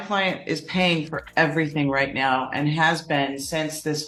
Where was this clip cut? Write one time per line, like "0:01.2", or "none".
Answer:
none